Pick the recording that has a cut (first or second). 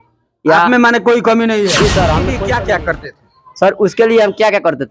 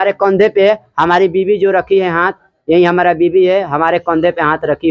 first